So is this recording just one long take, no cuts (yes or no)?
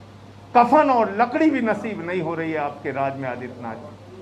yes